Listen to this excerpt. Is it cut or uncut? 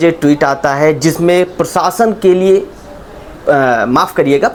uncut